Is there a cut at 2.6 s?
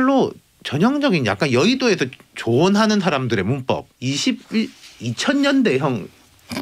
no; 1 cut; at 3.9 s

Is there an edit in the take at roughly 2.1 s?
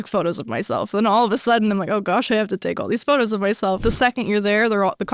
no; 1 cut; at 3.8 s

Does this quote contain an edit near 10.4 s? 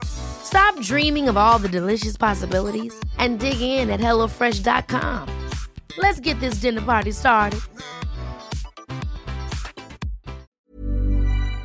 yes; 1 cut; at 10.4 s

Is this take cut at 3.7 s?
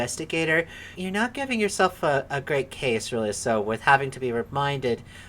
no; 1 cut; at 1.0 s

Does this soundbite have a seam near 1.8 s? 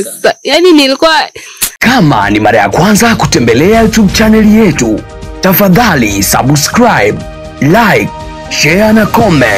yes; 1 cut; at 1.8 s

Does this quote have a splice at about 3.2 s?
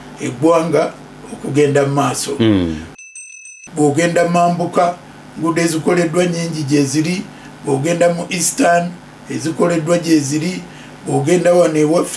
yes; 1 cut; at 3.2 s

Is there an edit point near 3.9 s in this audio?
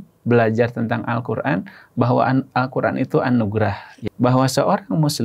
yes; 1 cut; at 3.9 s

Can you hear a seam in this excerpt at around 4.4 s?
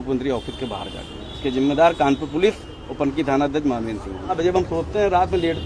yes; 1 cut; at 4.4 s

